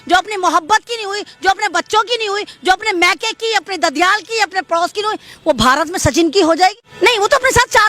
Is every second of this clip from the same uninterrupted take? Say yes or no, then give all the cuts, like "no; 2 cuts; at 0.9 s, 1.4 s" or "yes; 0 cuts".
no; 1 cut; at 6.9 s